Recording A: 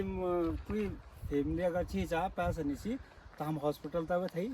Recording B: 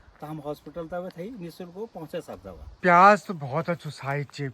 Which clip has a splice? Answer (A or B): B